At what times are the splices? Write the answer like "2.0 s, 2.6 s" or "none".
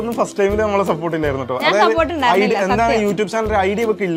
none